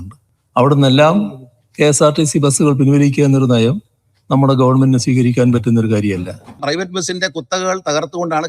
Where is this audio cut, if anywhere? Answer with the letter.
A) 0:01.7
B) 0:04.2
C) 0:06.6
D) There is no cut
C